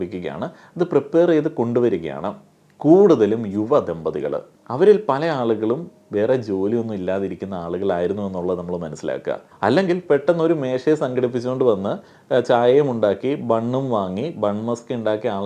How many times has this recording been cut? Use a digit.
1